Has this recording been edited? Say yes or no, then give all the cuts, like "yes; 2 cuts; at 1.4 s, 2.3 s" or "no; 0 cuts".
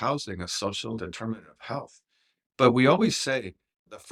no; 0 cuts